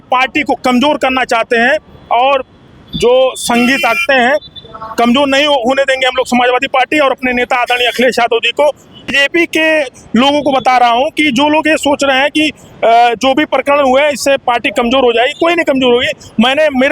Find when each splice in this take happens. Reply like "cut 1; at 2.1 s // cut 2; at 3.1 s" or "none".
cut 1; at 9.1 s